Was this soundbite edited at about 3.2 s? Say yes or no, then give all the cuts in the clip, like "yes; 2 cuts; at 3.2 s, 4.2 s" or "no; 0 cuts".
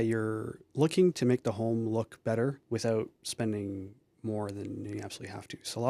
yes; 2 cuts; at 2.6 s, 3.2 s